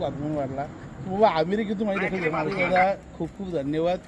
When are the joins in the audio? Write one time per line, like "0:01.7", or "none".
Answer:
0:02.5